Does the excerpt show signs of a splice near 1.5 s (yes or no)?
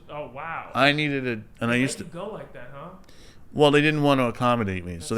yes